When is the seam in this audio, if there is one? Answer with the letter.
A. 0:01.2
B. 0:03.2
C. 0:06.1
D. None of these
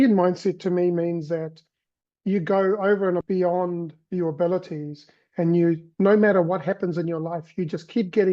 B